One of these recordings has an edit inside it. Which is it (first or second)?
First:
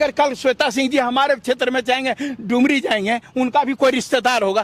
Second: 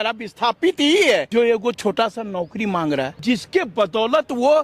second